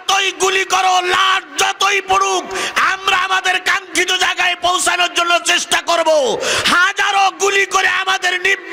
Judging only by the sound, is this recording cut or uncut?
uncut